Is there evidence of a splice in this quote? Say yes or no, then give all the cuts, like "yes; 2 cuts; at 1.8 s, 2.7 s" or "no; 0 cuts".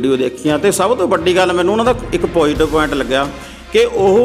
no; 0 cuts